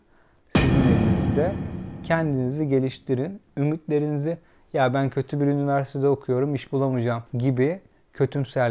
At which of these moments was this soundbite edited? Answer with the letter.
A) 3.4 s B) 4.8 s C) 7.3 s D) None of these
C